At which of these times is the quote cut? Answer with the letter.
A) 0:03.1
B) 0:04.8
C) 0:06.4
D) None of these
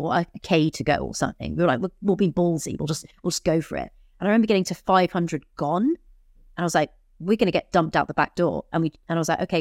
D